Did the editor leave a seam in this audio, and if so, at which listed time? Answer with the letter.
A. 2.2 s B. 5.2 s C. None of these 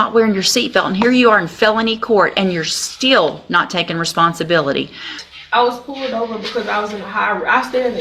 B